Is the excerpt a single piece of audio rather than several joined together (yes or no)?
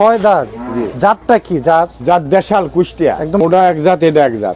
no